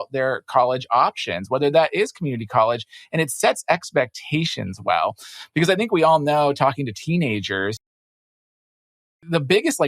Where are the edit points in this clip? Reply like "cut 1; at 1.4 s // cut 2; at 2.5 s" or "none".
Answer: none